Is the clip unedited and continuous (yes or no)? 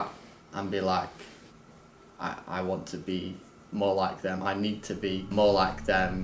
no